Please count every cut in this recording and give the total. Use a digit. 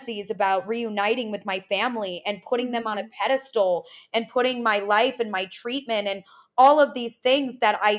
0